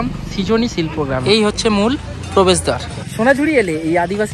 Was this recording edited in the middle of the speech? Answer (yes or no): yes